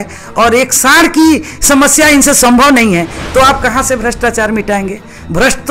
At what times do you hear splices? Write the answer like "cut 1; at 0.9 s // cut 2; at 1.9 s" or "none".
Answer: cut 1; at 3.2 s